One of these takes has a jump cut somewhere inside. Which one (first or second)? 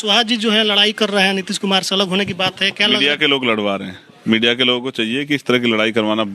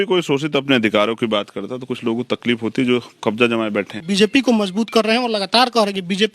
second